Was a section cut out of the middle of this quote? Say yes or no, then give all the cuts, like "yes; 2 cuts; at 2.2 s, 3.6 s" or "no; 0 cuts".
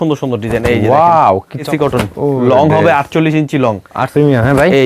yes; 2 cuts; at 1.7 s, 4.1 s